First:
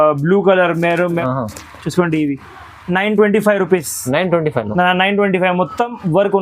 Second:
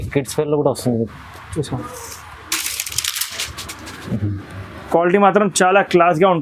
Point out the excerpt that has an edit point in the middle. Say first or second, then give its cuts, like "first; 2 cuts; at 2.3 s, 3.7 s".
first; 1 cut; at 1.2 s